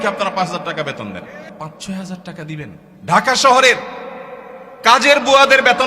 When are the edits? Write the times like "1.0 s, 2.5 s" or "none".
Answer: 1.5 s, 2.9 s

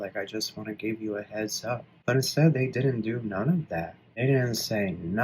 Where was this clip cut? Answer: 1.9 s, 4.0 s

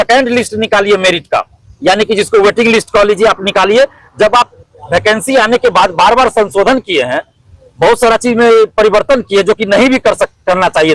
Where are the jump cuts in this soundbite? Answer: none

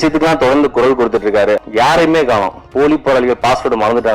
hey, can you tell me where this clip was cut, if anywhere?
1.6 s

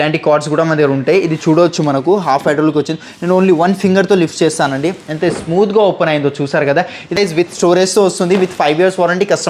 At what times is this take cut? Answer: 7.2 s

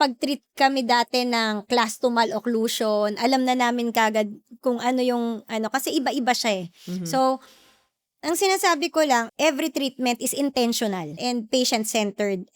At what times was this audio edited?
9.3 s, 11.1 s

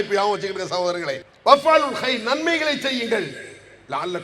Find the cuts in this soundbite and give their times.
1.2 s

